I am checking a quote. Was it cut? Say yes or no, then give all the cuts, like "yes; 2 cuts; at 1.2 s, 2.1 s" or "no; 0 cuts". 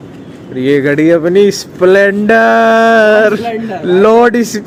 no; 0 cuts